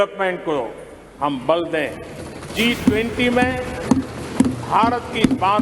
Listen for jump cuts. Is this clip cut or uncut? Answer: cut